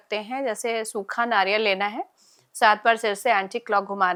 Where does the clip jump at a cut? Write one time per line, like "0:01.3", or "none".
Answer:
none